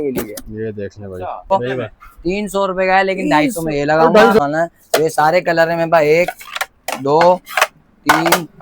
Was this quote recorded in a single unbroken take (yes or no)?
no